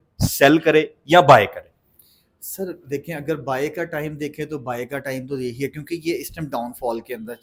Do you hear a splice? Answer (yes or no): no